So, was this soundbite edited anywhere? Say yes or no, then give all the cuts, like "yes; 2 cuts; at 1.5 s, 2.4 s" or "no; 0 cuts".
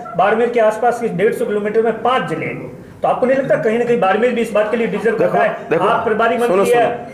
no; 0 cuts